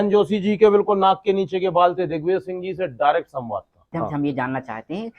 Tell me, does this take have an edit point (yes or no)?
yes